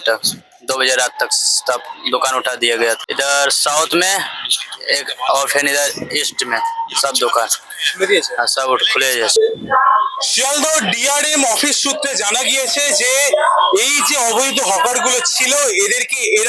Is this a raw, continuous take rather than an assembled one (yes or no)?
no